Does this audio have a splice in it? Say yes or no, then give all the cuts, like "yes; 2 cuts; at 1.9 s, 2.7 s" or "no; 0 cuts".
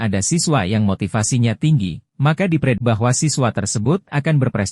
yes; 1 cut; at 2.8 s